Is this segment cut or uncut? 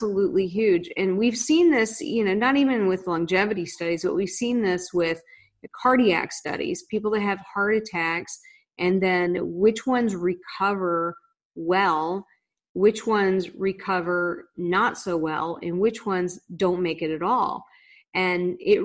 uncut